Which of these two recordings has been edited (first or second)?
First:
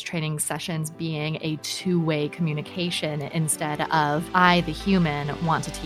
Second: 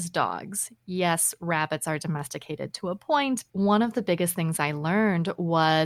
second